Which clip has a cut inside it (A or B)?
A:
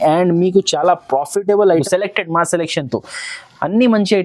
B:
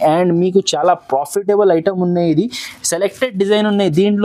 A